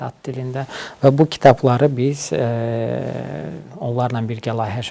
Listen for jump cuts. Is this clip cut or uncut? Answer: uncut